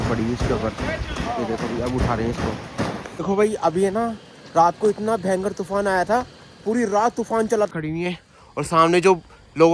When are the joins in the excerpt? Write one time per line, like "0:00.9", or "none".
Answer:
0:03.2
0:07.7